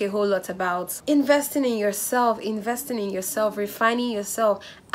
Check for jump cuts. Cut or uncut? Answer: cut